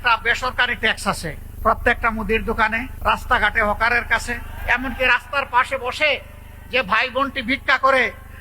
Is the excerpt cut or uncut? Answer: cut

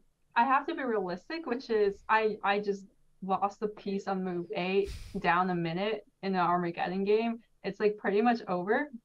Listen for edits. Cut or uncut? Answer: uncut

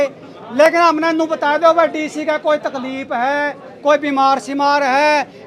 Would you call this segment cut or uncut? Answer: uncut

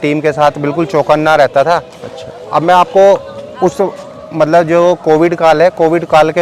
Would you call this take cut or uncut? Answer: uncut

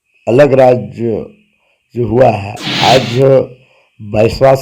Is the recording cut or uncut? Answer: uncut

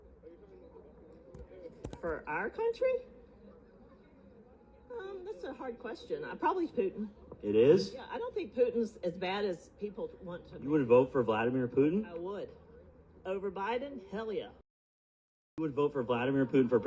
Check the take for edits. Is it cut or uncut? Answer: uncut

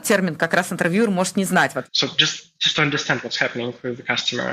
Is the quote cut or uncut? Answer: cut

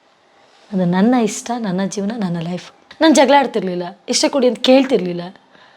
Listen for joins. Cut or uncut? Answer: cut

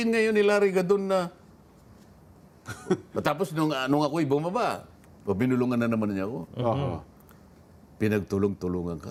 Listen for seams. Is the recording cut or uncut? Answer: uncut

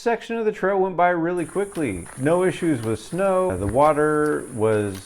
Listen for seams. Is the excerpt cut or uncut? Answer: cut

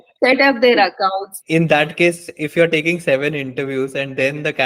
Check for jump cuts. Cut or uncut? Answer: cut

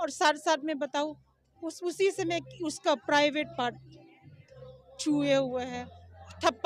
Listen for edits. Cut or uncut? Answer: uncut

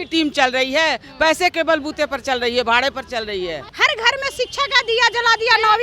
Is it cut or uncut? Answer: cut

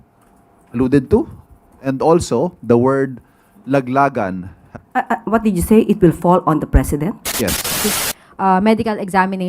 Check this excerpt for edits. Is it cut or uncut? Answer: cut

